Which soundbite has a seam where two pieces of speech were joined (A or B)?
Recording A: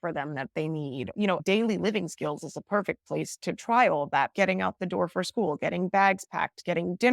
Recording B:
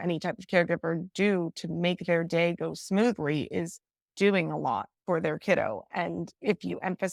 A